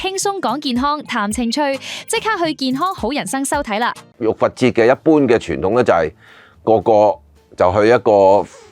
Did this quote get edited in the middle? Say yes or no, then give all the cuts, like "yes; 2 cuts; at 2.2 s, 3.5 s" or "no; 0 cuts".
yes; 1 cut; at 4.2 s